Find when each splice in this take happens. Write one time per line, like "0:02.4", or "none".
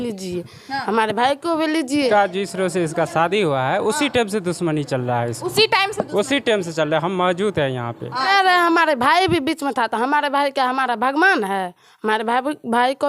0:02.1
0:08.2